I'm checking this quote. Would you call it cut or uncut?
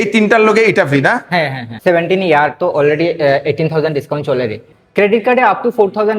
cut